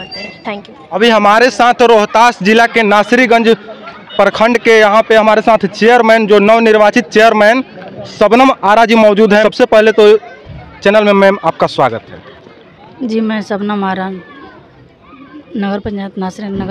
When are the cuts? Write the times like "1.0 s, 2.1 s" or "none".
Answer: 1.0 s, 9.4 s